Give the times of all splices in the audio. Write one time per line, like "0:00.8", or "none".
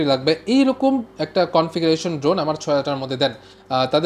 none